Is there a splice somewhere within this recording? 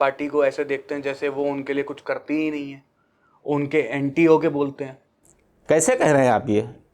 no; 0 cuts

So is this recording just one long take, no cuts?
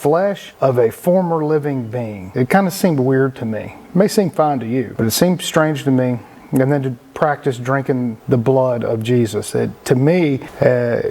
yes; 0 cuts

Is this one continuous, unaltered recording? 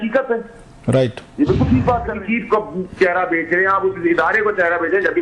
no; 1 cut; at 2.2 s

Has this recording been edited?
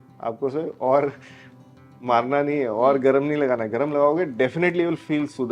no; 0 cuts

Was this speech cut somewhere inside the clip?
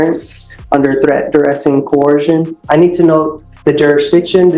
yes; 1 cut; at 2.6 s

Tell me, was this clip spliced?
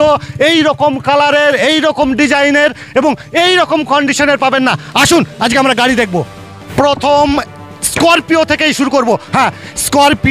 no; 0 cuts

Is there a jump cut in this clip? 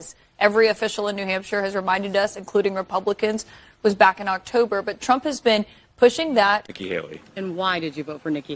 yes; 1 cut; at 6.7 s

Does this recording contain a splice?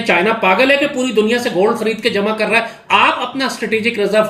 no; 0 cuts

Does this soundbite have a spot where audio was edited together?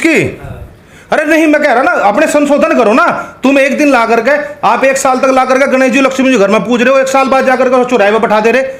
no; 0 cuts

